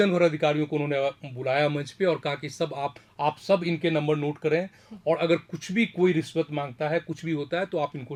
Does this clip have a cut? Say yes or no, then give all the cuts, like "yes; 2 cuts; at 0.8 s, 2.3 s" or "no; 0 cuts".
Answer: no; 0 cuts